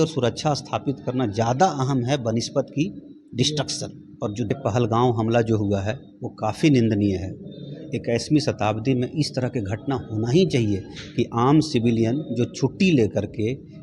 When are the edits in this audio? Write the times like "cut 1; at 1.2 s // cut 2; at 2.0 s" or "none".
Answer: cut 1; at 4.5 s